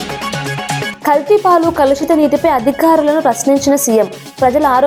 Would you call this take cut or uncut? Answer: uncut